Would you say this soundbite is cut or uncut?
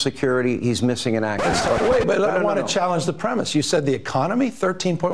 cut